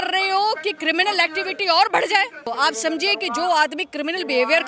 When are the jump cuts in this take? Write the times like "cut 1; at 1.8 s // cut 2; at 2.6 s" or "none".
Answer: cut 1; at 2.5 s